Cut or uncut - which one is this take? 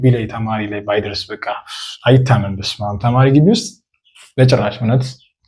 uncut